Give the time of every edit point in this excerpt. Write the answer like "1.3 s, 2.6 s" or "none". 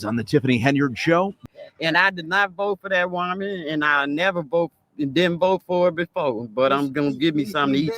1.4 s